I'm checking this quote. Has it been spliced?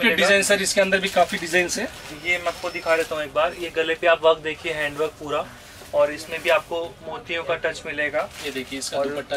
no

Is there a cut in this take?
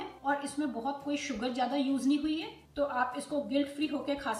yes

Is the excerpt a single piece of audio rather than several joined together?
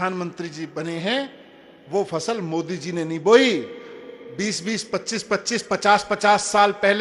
yes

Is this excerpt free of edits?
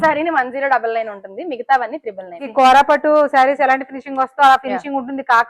no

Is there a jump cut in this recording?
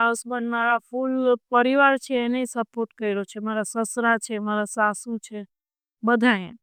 no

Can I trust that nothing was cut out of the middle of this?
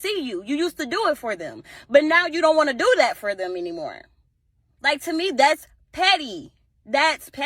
no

